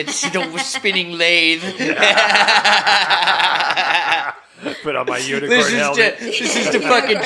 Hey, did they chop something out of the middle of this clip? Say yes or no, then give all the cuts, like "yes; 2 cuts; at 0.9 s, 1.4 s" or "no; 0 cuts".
no; 0 cuts